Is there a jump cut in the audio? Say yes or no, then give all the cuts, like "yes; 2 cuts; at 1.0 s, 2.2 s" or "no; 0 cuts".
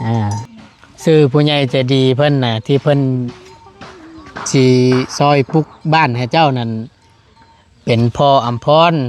no; 0 cuts